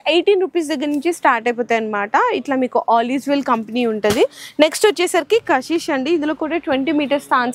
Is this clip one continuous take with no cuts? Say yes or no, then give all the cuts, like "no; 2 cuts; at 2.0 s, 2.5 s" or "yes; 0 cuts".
yes; 0 cuts